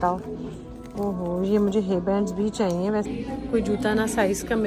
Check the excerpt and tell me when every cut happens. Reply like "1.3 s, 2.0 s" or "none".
3.1 s